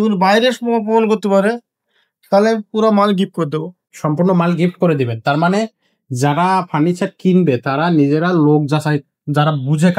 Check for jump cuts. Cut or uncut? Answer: uncut